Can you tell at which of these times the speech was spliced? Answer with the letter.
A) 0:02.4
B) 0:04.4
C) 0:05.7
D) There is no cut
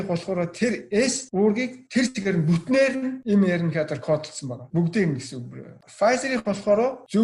C